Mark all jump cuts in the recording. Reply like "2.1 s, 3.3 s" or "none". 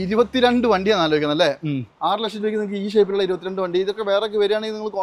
none